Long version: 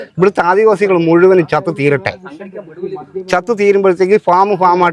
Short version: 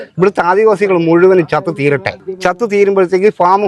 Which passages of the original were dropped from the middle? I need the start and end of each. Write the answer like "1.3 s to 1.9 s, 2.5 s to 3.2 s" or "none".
2.2 s to 3.1 s